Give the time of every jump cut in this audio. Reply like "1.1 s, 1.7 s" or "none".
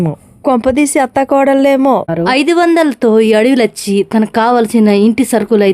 2.1 s